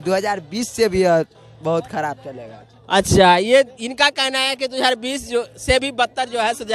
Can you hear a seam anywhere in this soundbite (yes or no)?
no